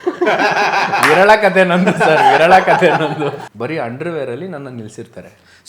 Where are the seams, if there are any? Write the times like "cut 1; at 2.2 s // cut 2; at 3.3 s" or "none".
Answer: cut 1; at 3.5 s